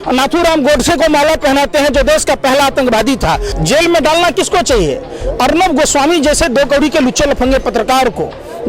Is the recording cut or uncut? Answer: cut